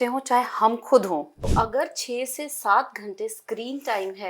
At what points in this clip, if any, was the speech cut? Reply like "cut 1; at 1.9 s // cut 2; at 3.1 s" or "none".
cut 1; at 1.5 s